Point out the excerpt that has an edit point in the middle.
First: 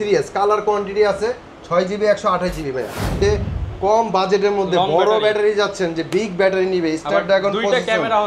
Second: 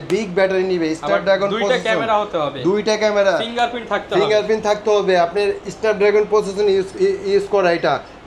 first; 1 cut; at 3.2 s

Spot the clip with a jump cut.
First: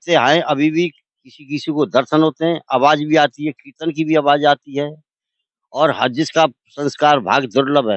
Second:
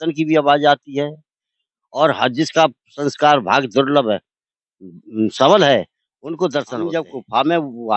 second; 1 cut; at 6.8 s

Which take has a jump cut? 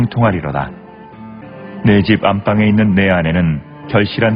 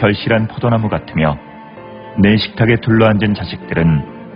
first; 1 cut; at 1.4 s

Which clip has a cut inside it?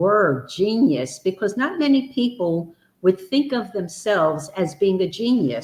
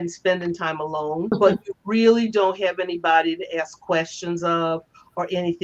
second; 1 cut; at 1.3 s

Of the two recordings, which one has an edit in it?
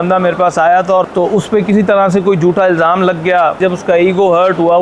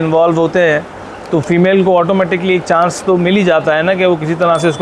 first; 2 cuts; at 1.1 s, 3.6 s

